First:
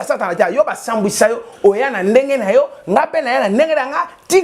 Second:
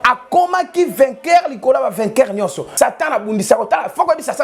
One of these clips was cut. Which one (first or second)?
second